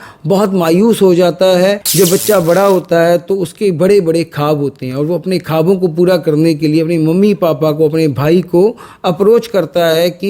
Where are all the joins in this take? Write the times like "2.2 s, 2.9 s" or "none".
1.8 s